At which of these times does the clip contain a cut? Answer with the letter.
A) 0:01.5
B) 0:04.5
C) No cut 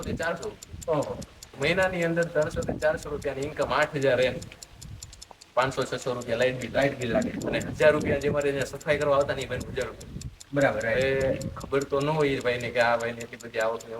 A